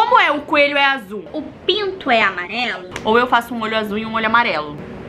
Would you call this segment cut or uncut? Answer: cut